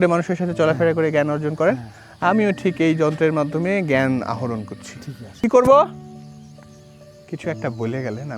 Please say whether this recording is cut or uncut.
cut